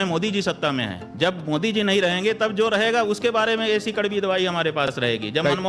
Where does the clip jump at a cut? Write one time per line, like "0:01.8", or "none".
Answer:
0:01.0